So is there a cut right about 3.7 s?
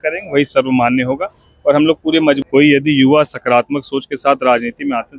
no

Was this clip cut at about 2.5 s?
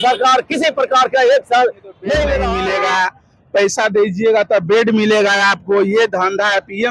yes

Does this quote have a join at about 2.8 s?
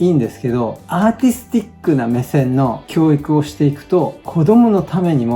yes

